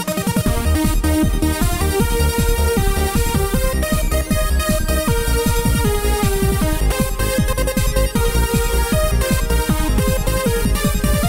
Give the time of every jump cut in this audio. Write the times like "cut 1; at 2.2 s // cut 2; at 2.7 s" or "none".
cut 1; at 4.9 s